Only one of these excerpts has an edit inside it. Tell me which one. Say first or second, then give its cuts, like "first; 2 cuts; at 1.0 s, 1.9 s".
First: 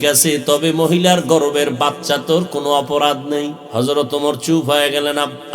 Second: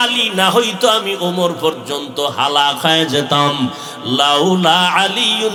first; 1 cut; at 3.6 s